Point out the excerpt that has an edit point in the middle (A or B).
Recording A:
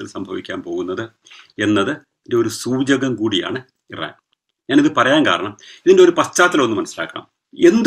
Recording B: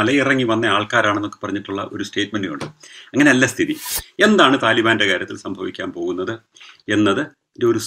B